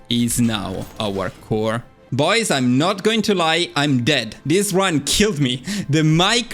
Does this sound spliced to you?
yes; 1 cut; at 1.9 s

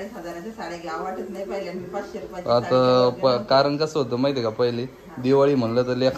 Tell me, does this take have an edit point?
no; 0 cuts

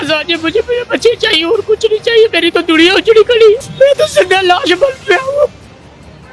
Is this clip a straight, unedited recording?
no; 1 cut; at 3.7 s

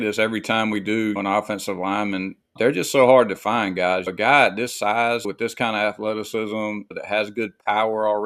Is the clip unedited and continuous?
no; 5 cuts; at 1.2 s, 2.5 s, 4.1 s, 5.3 s, 7.0 s

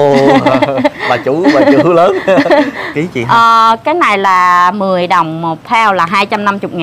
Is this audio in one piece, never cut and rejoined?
no; 1 cut; at 2.8 s

